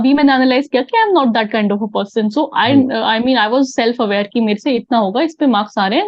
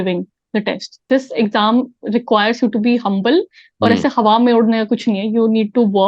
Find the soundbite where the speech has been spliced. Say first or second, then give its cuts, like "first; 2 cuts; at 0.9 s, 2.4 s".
second; 1 cut; at 1.0 s